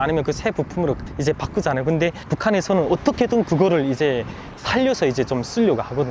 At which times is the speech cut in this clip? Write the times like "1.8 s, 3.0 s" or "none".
none